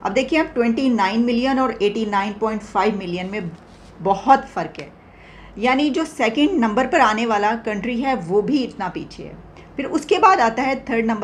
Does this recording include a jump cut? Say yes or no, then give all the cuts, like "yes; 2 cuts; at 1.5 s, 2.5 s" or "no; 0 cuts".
no; 0 cuts